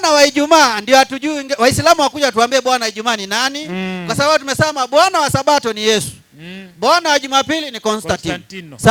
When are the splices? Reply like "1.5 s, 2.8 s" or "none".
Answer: none